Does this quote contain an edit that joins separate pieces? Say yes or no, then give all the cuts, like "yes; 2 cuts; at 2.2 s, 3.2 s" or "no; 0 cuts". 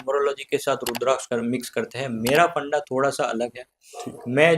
yes; 1 cut; at 1.2 s